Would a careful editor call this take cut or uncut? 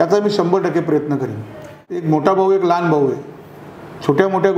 cut